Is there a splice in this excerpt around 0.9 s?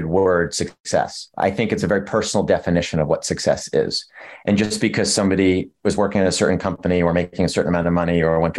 yes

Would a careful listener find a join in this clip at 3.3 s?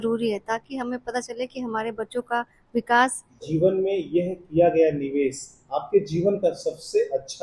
yes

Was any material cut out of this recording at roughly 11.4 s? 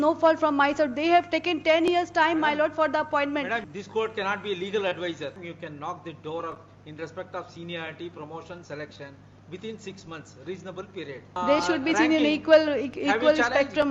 yes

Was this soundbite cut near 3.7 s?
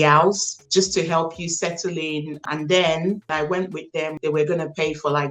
yes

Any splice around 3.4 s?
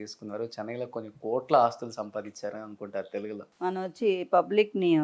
yes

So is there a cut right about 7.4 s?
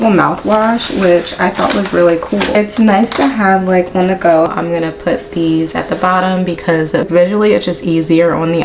no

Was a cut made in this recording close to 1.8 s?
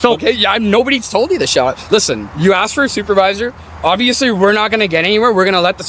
no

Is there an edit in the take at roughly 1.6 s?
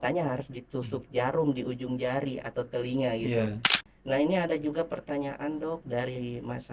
no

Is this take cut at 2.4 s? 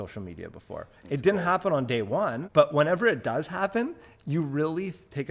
yes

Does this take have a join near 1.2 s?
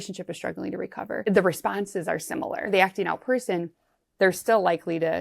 yes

